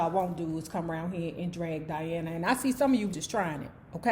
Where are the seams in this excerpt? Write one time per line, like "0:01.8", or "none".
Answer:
0:03.1